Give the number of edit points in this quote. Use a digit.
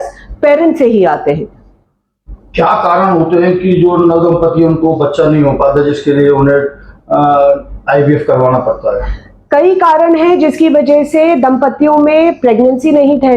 0